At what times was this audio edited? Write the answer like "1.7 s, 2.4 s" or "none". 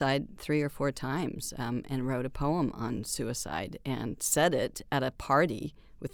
none